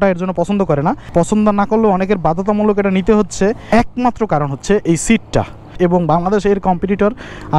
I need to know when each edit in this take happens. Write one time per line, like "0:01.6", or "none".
0:01.0
0:03.6
0:05.6